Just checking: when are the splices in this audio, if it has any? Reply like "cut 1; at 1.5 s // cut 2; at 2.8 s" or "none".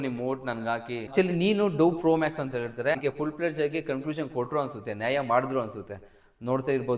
cut 1; at 1.0 s